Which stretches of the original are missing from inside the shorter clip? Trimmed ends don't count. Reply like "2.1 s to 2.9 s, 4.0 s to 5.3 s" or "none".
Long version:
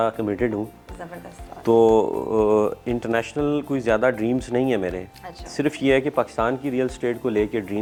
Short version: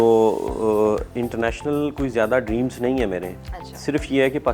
none